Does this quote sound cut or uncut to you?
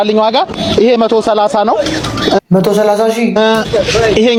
uncut